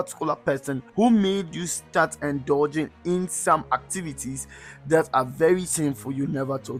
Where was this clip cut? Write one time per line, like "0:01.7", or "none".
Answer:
none

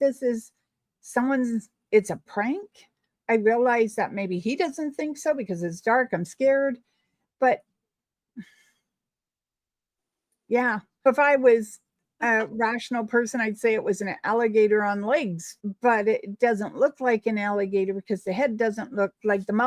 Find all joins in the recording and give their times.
0:15.4

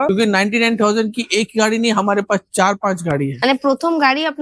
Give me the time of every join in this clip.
none

